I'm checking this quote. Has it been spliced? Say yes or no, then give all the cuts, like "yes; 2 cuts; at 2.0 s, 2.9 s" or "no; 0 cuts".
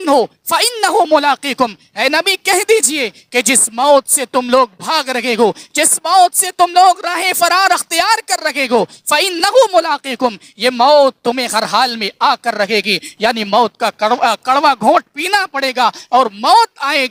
no; 0 cuts